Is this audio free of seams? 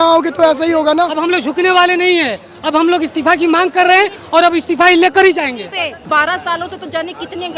no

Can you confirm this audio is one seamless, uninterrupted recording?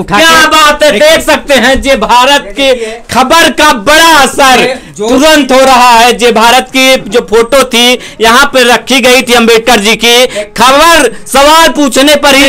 yes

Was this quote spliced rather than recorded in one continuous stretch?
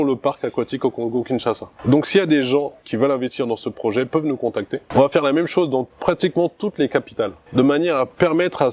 yes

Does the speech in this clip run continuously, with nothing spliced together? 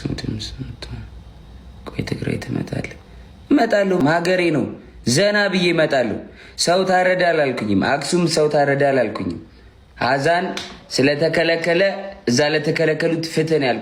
no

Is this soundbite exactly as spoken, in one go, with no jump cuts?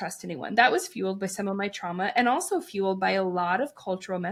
yes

